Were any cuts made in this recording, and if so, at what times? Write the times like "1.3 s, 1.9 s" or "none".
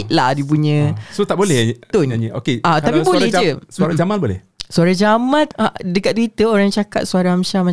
5.5 s